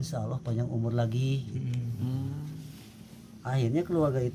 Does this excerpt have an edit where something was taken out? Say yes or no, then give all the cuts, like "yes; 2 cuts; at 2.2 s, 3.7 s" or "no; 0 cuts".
no; 0 cuts